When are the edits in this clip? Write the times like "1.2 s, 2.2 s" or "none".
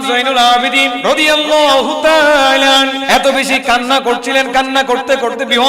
1.0 s, 3.0 s